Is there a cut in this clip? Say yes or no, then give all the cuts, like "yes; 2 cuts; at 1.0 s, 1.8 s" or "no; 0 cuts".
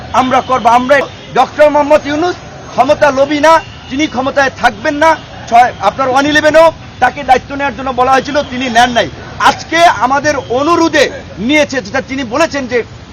yes; 1 cut; at 1.1 s